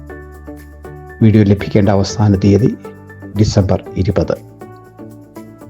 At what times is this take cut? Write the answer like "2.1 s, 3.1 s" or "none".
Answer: 1.1 s